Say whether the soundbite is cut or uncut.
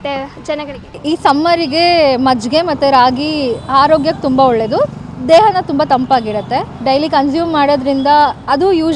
cut